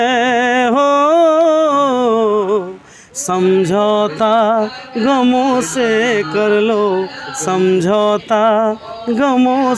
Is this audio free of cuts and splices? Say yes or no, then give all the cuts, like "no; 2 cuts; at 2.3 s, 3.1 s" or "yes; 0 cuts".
yes; 0 cuts